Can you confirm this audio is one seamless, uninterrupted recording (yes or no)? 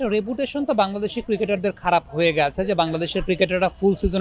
yes